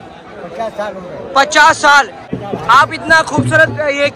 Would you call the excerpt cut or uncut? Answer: cut